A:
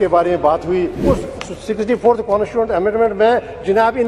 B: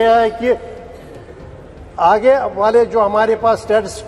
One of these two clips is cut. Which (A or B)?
A